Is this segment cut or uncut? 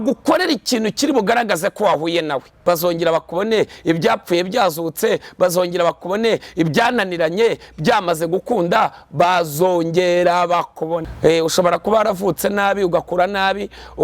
cut